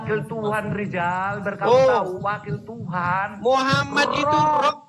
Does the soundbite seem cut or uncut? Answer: uncut